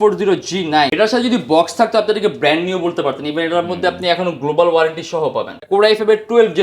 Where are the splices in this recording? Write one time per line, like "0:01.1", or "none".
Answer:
0:00.9
0:05.6